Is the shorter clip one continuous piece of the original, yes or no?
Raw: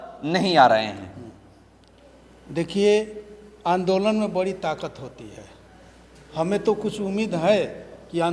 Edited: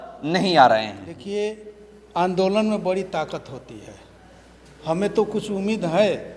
no